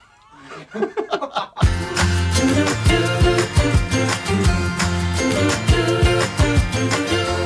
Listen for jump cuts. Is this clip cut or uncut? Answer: uncut